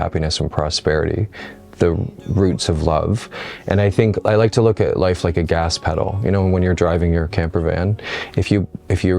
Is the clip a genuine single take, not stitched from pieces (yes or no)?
yes